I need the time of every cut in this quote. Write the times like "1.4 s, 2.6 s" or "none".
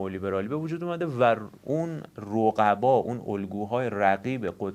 none